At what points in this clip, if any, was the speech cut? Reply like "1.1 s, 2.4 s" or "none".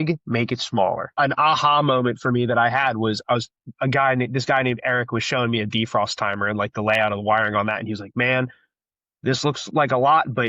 1.1 s